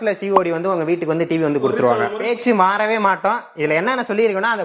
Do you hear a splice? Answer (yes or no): yes